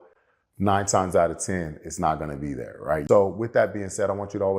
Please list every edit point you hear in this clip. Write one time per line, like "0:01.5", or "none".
0:03.0